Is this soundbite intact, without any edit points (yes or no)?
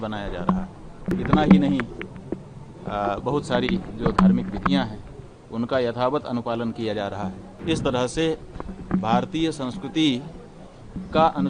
no